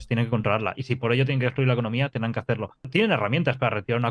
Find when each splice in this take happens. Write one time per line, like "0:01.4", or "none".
0:02.9

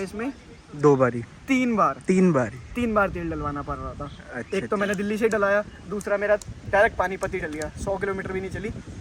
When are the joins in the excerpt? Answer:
none

